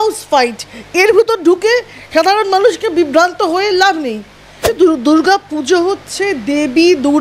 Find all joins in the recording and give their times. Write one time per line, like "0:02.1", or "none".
0:04.7